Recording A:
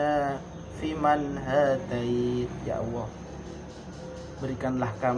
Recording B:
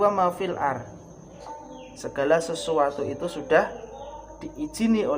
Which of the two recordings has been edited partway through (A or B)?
B